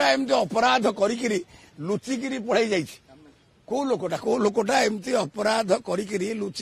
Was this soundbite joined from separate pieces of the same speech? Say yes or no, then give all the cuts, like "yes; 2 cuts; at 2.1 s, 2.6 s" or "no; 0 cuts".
no; 0 cuts